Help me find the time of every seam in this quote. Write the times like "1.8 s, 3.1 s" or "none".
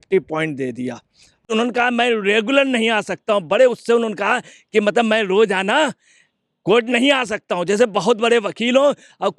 1.5 s